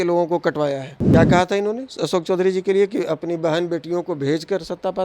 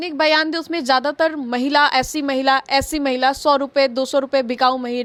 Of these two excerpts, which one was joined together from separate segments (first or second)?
first